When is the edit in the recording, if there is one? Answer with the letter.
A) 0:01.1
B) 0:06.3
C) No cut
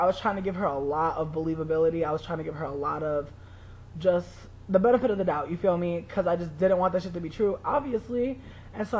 A